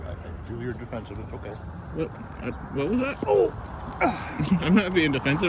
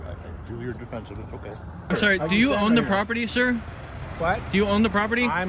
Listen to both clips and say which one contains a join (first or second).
second